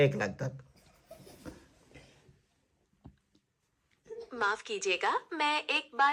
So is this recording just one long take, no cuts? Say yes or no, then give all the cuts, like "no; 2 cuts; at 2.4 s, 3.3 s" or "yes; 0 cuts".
yes; 0 cuts